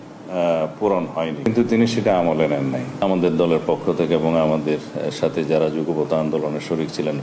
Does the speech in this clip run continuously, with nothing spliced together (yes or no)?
no